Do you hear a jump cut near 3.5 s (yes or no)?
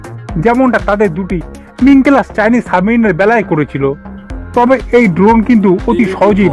no